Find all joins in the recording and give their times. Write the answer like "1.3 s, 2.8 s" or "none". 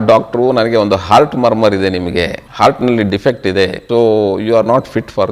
2.4 s, 3.8 s